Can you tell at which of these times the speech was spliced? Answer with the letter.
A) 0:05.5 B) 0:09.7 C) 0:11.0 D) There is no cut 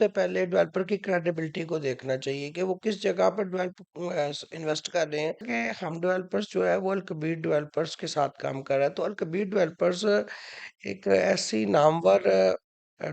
A